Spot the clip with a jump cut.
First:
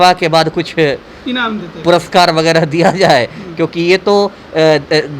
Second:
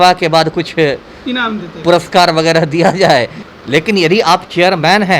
second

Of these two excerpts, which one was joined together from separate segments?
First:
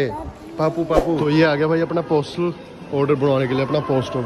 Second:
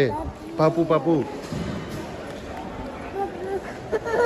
first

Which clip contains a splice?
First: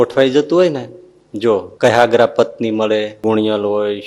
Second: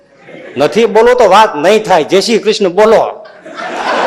first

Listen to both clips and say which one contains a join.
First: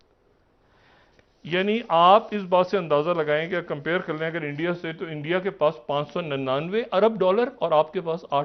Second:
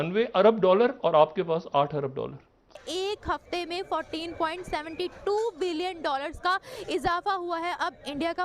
second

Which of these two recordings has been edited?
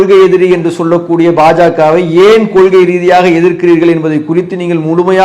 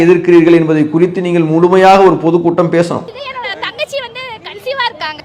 second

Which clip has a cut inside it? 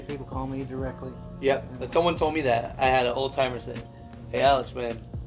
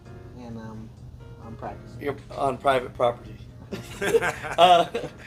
first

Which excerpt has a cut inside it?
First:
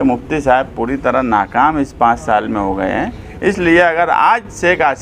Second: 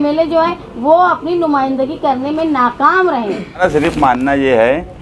second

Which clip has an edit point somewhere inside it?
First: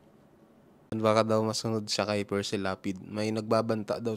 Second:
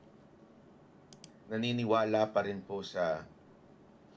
first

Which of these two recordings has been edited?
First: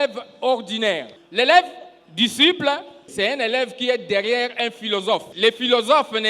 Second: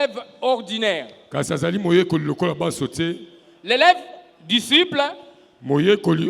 first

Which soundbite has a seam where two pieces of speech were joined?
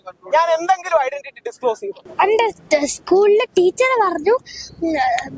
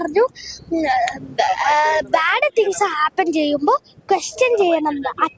first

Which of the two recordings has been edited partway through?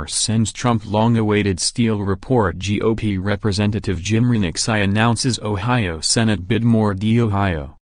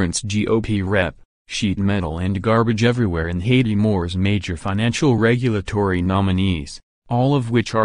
first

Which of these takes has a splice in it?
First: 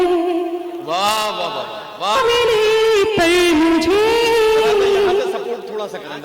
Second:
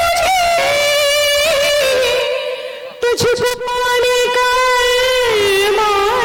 first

